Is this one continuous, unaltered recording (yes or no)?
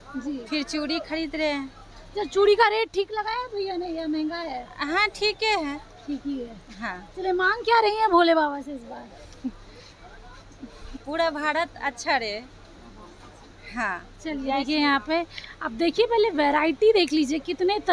yes